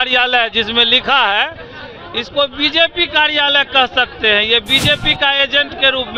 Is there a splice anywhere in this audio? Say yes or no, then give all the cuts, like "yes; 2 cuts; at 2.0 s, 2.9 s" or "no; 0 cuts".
no; 0 cuts